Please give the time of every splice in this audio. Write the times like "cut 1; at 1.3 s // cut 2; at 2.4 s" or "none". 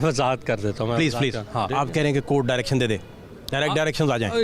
cut 1; at 1.7 s